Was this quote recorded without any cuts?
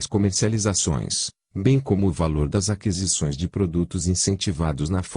no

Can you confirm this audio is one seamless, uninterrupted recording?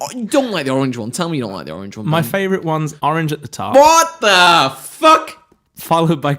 no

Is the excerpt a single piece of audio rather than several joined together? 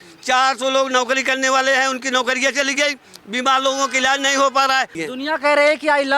no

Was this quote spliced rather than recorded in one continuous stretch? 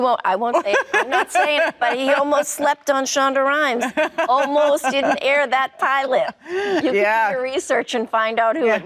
no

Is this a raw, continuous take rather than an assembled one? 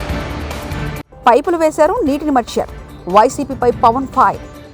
yes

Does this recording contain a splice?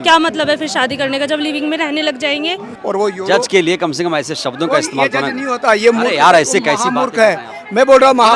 yes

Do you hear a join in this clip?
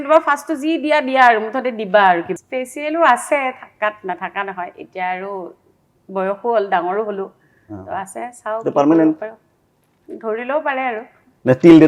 yes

